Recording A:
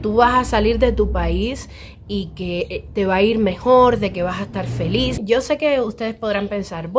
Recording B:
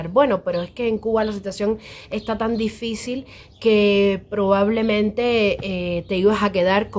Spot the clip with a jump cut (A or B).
A